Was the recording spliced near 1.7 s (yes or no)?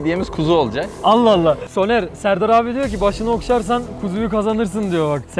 yes